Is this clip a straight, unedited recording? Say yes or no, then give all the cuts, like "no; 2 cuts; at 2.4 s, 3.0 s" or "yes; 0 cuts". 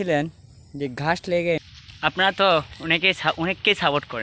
no; 1 cut; at 1.6 s